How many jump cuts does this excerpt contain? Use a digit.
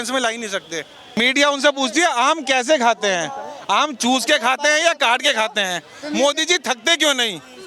1